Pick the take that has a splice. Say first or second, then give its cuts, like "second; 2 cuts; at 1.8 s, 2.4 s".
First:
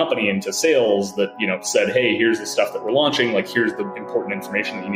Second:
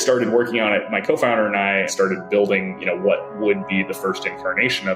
second; 1 cut; at 1.9 s